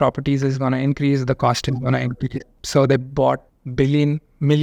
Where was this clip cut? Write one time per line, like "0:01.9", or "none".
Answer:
0:02.5